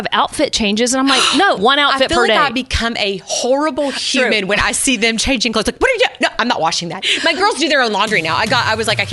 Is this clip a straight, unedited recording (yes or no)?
no